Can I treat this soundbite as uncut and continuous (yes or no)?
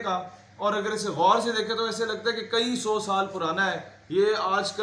yes